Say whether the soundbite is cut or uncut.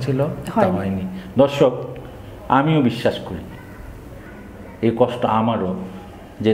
cut